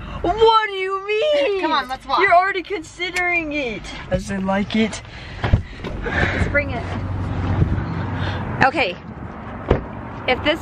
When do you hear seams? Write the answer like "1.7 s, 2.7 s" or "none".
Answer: none